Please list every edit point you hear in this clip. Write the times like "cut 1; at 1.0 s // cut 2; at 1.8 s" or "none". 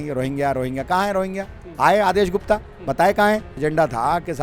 cut 1; at 3.5 s